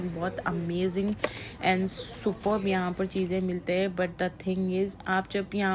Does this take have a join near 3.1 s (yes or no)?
no